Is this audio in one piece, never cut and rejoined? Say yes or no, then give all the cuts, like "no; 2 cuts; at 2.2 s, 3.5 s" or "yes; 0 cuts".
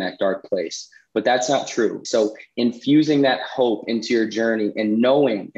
no; 1 cut; at 2.0 s